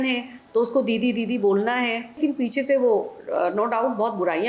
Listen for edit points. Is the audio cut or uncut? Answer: cut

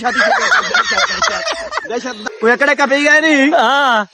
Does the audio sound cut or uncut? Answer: cut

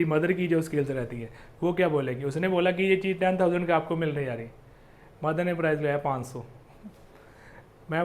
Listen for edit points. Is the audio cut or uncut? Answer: uncut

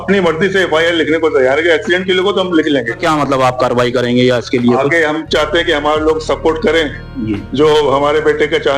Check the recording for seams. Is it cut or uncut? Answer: cut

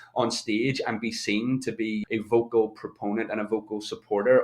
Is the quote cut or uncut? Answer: cut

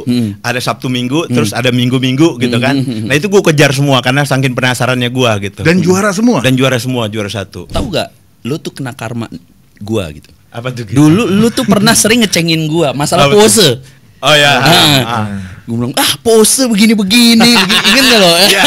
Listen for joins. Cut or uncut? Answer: cut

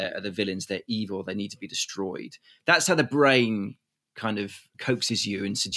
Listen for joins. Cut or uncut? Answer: uncut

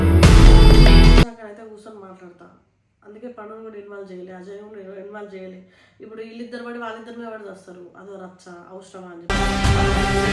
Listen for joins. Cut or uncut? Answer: cut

